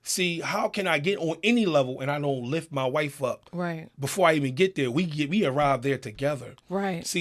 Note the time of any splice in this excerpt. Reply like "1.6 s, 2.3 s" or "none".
none